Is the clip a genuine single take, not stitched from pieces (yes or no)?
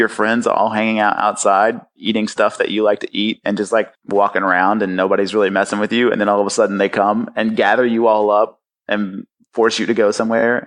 no